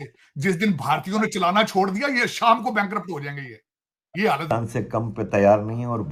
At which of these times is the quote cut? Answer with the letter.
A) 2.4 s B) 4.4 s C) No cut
B